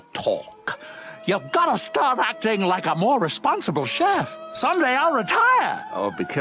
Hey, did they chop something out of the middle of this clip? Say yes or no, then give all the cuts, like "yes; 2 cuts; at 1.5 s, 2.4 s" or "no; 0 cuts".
no; 0 cuts